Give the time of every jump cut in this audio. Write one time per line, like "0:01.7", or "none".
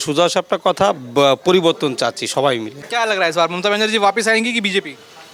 none